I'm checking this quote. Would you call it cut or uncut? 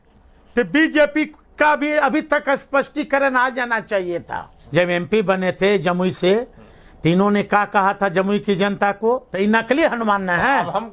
cut